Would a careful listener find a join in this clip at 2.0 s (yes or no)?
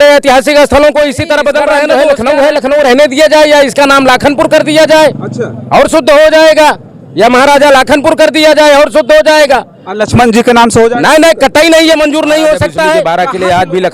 yes